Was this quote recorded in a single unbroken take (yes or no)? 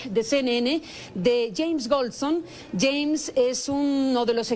yes